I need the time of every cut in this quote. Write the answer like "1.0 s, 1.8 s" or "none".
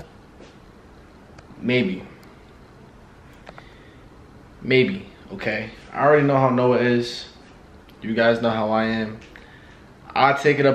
none